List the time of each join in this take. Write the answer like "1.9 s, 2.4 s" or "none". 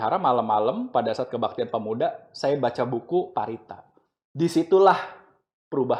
none